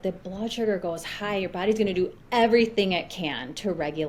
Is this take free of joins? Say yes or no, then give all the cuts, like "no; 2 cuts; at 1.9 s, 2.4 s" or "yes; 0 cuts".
yes; 0 cuts